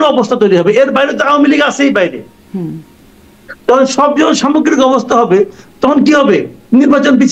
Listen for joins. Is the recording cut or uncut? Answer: uncut